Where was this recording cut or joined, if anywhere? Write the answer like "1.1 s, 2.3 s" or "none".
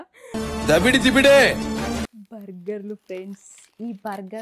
2.2 s